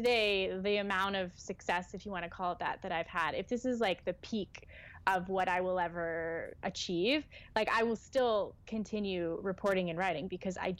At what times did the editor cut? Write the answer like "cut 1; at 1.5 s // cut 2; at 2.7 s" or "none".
none